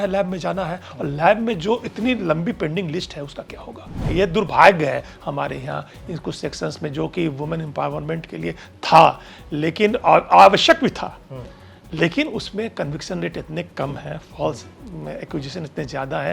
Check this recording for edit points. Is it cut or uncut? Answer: cut